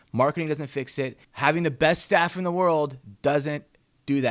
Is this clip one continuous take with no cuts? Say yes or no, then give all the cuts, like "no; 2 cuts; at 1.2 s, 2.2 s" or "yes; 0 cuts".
no; 1 cut; at 1.2 s